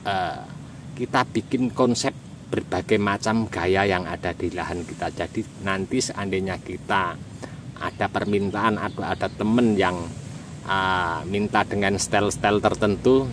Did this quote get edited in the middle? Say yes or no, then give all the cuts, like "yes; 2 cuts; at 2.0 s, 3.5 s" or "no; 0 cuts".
no; 0 cuts